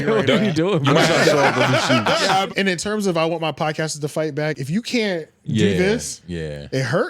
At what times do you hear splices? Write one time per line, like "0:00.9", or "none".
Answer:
0:02.5
0:04.6
0:06.2